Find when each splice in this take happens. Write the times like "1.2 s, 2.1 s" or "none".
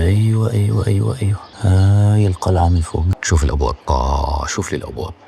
1.5 s, 3.2 s